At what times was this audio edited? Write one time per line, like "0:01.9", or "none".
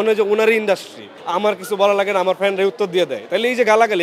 0:01.1